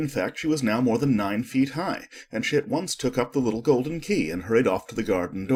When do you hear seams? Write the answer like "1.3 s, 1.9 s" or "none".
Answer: none